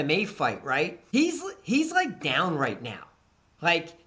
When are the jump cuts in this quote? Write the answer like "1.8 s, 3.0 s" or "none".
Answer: 1.0 s

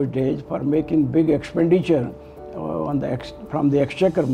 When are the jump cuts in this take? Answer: none

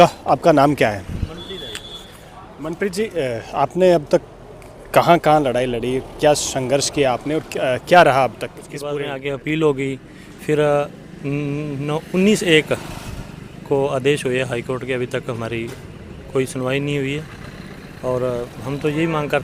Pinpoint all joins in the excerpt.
8.9 s

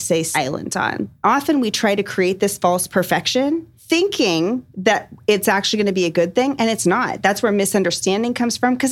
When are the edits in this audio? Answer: 1.1 s, 3.4 s

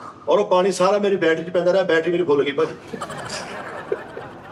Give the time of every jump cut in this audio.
none

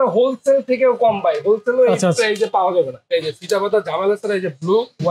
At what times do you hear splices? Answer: 3.0 s

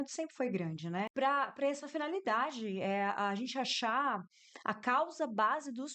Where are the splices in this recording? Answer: 1.1 s

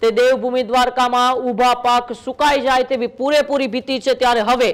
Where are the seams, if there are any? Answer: none

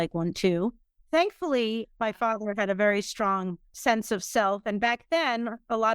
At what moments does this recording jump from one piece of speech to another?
1.8 s, 3.6 s

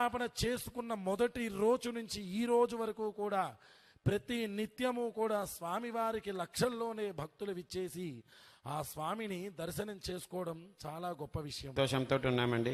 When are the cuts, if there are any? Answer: 11.7 s

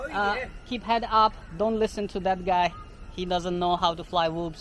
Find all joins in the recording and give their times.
none

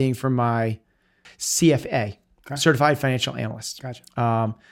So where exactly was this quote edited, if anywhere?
1.3 s

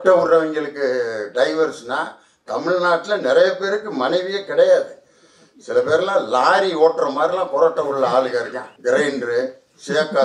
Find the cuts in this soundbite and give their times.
8.6 s

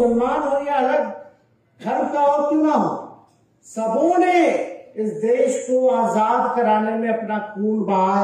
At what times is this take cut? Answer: none

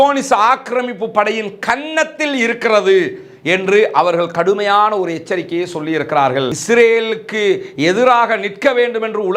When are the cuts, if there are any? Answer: 6.6 s

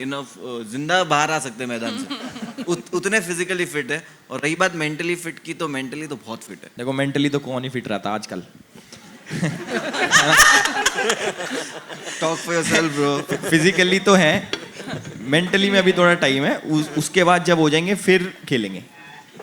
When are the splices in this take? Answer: 6.6 s

